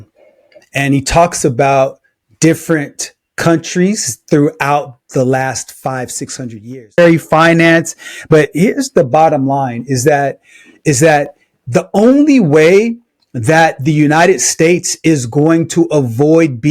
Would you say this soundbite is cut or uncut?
cut